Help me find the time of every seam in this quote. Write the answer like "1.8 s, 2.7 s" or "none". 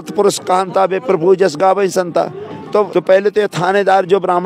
2.9 s